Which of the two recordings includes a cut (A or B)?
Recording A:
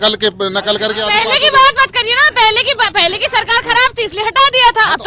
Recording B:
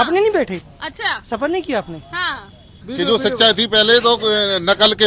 B